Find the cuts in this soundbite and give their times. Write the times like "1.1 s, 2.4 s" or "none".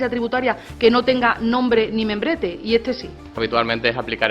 3.4 s